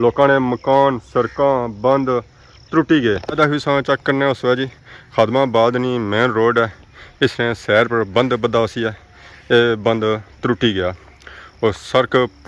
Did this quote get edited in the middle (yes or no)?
no